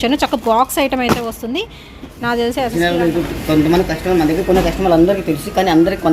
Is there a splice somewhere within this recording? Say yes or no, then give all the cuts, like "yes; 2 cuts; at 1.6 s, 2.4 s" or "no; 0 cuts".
yes; 1 cut; at 2.7 s